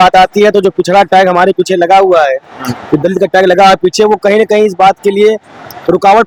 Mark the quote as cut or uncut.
uncut